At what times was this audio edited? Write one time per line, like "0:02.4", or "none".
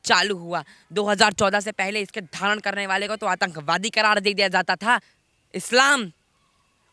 0:05.1